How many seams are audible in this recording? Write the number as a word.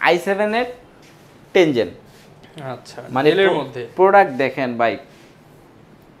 zero